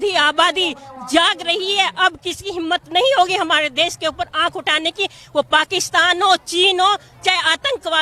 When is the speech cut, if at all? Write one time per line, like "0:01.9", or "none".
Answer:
none